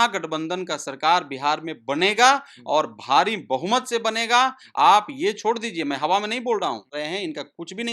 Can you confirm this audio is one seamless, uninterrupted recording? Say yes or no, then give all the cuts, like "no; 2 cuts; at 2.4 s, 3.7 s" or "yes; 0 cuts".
no; 1 cut; at 6.9 s